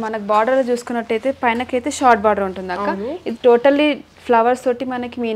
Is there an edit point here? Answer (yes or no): no